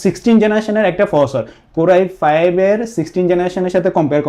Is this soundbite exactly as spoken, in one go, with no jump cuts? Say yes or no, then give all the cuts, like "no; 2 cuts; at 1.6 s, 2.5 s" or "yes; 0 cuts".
yes; 0 cuts